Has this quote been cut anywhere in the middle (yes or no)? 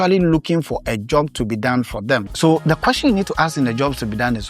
yes